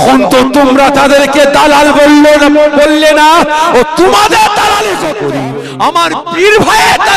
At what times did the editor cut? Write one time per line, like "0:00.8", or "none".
0:05.2